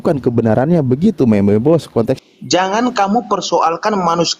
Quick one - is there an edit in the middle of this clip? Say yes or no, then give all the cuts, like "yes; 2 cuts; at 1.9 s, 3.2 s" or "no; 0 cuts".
yes; 1 cut; at 2.2 s